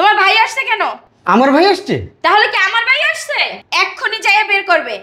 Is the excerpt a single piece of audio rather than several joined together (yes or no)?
no